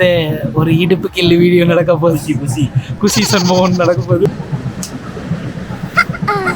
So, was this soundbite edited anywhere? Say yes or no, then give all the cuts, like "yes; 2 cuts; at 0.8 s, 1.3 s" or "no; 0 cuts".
yes; 1 cut; at 4.3 s